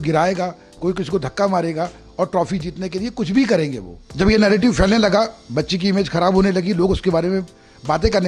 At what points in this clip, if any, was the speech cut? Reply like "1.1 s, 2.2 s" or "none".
4.0 s

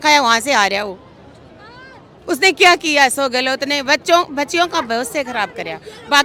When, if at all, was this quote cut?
none

